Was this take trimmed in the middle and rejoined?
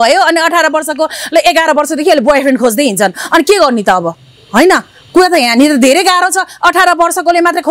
no; 0 cuts

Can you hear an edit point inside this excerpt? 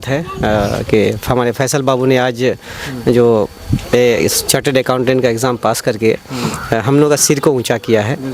no; 0 cuts

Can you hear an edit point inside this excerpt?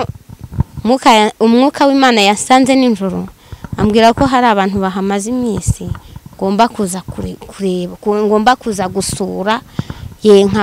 no; 0 cuts

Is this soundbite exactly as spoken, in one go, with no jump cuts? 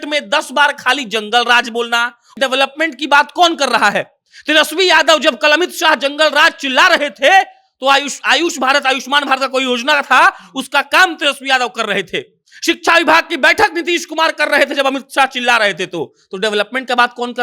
no; 1 cut; at 2.3 s

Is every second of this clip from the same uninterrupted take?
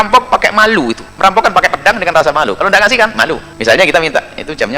no; 2 cuts; at 1.0 s, 3.5 s

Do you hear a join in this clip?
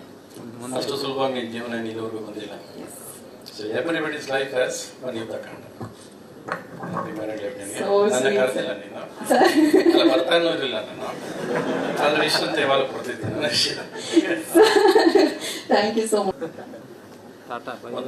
yes; 1 cut; at 16.3 s

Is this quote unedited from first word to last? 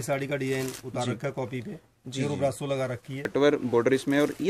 no; 1 cut; at 3.2 s

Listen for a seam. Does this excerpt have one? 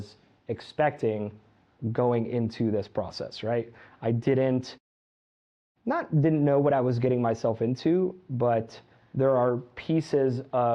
no; 0 cuts

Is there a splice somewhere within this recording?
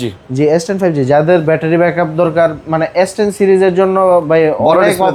no; 0 cuts

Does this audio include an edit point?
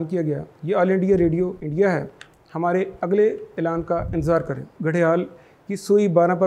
yes; 2 cuts; at 1.6 s, 4.7 s

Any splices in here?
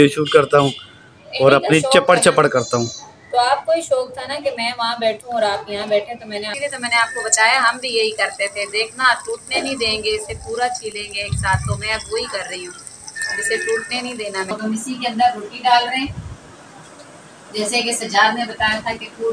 yes; 2 cuts; at 6.5 s, 14.5 s

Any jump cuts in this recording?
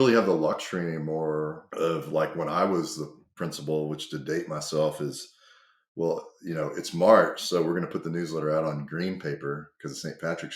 yes; 1 cut; at 1.6 s

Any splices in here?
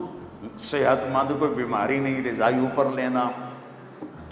no; 0 cuts

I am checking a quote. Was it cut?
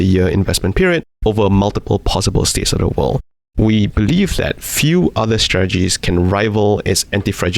yes; 1 cut; at 3.2 s

